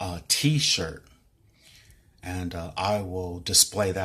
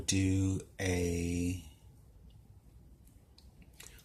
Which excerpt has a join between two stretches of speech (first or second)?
first